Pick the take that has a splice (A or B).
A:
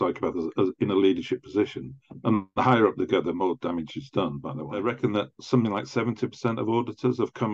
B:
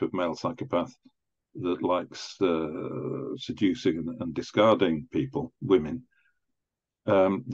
A